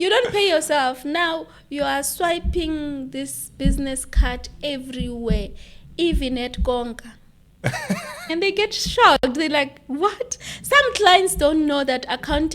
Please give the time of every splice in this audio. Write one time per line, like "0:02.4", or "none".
0:08.3

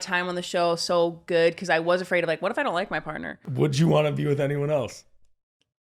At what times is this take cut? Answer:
0:03.4

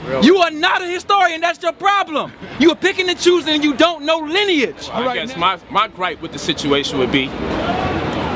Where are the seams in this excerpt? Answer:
0:05.1

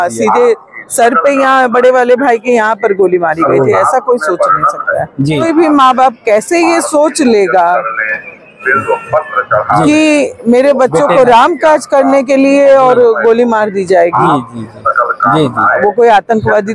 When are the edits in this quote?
0:05.4

